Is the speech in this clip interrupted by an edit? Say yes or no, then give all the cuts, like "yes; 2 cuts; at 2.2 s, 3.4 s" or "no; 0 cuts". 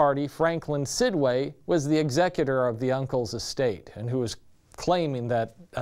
no; 0 cuts